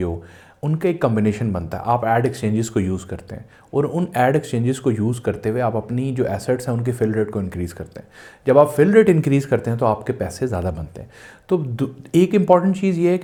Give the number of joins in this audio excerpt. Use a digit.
0